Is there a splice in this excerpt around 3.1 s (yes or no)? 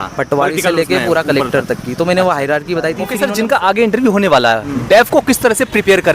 yes